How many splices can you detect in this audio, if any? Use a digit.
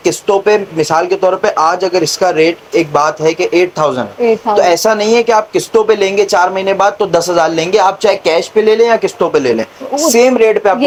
0